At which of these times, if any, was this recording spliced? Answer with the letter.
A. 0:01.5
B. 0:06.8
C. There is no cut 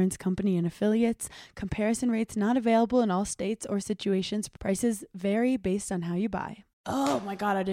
B